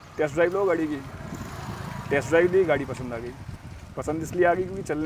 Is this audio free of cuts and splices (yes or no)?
yes